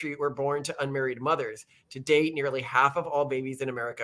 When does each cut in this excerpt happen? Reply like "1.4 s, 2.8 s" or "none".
none